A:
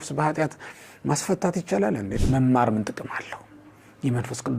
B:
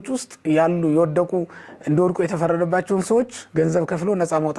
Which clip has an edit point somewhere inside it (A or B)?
A